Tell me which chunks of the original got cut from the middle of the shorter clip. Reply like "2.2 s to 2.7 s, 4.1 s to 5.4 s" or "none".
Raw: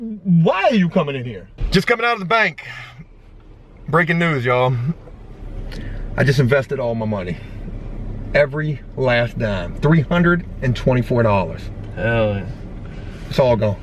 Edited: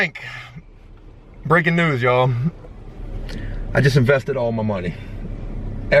none